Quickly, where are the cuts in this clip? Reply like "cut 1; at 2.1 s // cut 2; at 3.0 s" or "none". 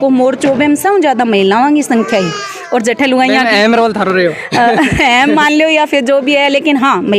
none